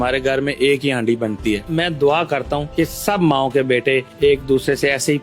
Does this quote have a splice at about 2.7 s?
yes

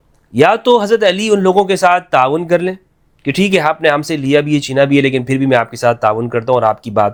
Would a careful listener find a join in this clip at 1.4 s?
no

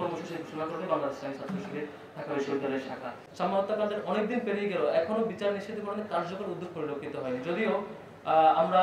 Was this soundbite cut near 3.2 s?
yes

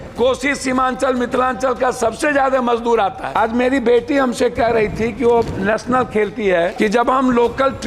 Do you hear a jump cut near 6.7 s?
yes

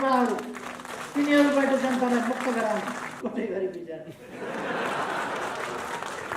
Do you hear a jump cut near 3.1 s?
yes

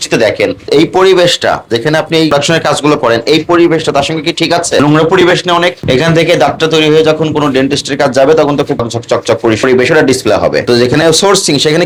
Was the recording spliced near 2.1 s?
no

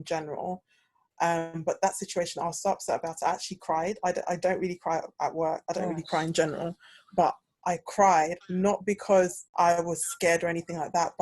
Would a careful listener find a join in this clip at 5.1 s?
no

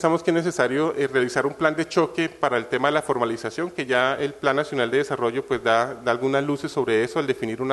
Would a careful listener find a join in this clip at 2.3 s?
no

